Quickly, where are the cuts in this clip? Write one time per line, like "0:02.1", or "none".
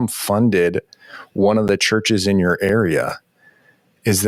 none

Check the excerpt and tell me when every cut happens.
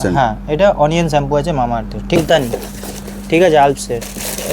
0:02.2

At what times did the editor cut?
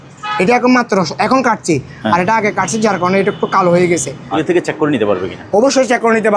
0:04.3

